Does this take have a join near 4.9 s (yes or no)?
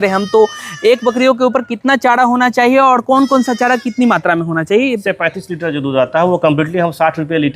yes